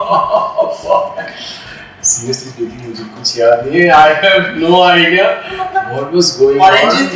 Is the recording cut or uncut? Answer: uncut